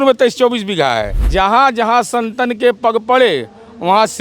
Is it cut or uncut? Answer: cut